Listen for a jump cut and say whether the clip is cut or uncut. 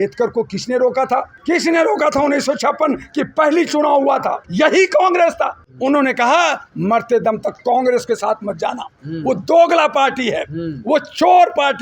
cut